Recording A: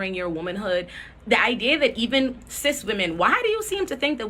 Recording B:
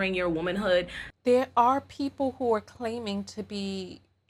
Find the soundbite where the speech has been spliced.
A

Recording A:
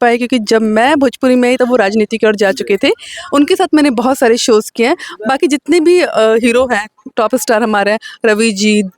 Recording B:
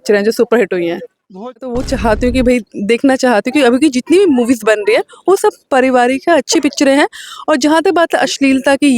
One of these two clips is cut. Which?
B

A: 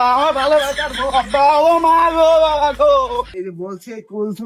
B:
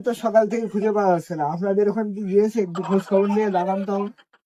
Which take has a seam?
A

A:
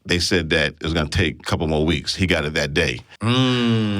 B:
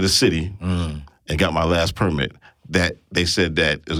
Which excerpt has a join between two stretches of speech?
A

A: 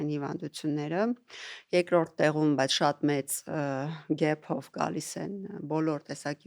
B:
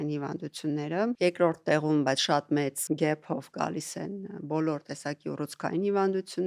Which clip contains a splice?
B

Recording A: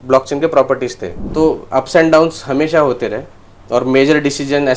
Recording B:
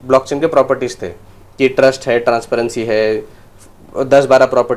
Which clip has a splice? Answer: A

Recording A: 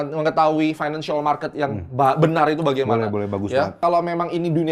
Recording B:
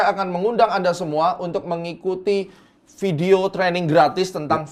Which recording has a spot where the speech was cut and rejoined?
A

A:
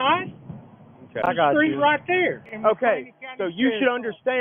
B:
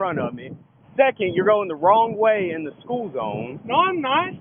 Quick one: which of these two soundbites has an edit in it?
A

